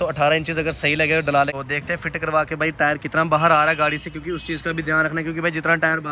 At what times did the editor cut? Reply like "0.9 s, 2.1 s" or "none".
1.5 s